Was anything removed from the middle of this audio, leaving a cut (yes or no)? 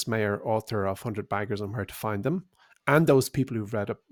no